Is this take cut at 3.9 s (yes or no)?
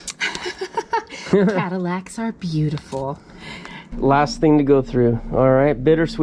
yes